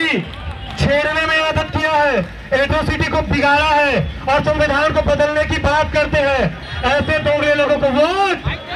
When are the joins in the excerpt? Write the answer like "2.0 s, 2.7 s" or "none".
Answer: none